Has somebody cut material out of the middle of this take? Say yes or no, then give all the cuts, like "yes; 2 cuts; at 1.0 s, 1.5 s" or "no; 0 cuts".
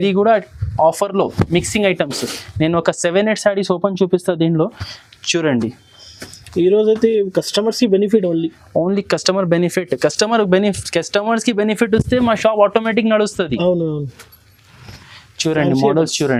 no; 0 cuts